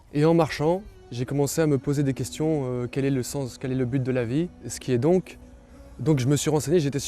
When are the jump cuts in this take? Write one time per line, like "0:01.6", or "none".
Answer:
0:04.7